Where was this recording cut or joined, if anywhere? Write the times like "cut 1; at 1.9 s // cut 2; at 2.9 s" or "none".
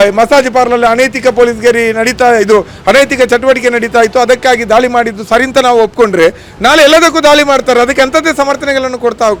none